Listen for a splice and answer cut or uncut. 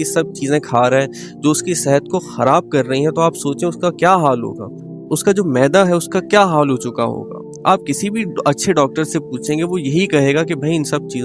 uncut